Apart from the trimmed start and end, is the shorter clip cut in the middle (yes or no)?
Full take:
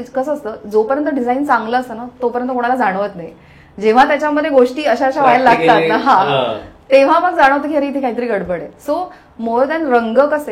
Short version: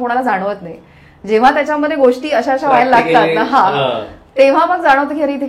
no